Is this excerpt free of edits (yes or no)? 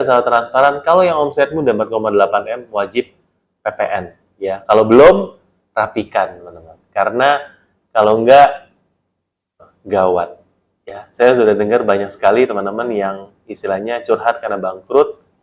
yes